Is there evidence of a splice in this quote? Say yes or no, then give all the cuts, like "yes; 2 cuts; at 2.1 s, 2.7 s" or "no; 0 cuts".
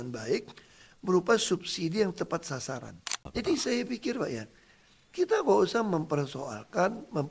yes; 1 cut; at 3.3 s